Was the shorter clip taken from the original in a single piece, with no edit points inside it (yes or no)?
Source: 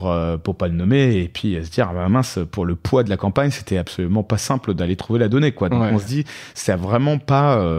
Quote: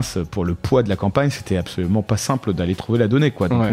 yes